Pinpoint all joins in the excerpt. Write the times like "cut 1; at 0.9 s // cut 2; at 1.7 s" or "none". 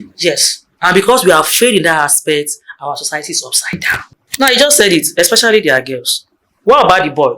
cut 1; at 4.3 s